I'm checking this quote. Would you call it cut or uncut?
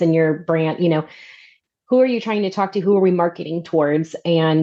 cut